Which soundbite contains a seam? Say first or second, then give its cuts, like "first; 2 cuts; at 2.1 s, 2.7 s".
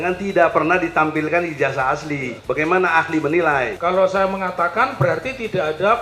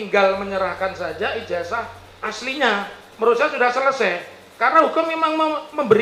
first; 2 cuts; at 2.3 s, 3.8 s